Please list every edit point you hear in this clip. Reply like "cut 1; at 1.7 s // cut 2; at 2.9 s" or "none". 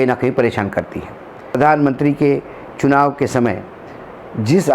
cut 1; at 1.6 s